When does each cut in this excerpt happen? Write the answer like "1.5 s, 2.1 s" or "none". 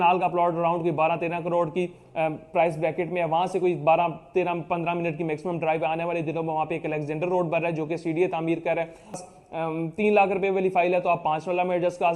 9.2 s